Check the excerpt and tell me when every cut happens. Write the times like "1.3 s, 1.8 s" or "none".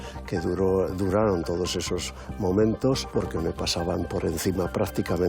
3.1 s